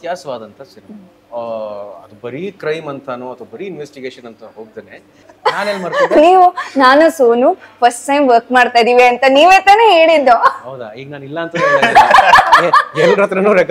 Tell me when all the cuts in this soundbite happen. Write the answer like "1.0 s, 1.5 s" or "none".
5.2 s

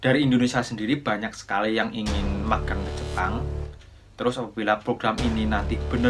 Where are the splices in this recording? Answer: none

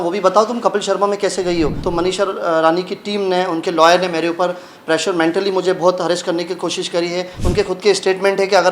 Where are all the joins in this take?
1.8 s, 7.4 s

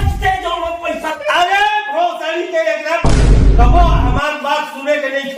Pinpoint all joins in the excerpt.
1.2 s

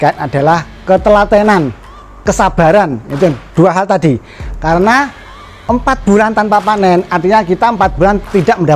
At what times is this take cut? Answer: none

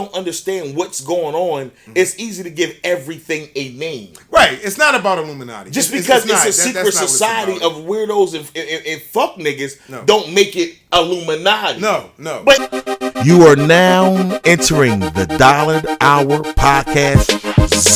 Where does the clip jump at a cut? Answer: 12.6 s

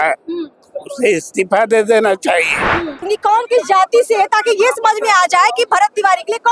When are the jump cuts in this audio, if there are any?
3.0 s

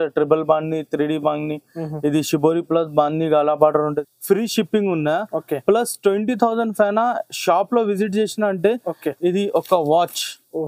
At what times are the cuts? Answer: 3.8 s

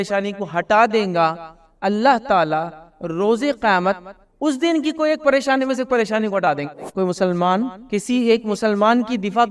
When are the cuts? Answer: 6.8 s, 7.8 s

